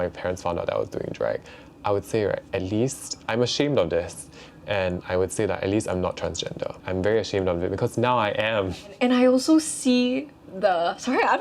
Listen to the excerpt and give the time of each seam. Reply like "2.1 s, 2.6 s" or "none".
6.8 s, 8.9 s